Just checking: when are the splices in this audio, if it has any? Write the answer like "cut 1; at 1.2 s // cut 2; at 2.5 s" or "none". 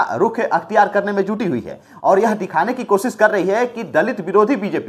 none